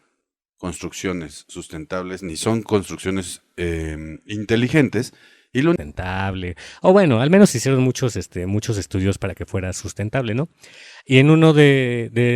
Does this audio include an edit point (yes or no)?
yes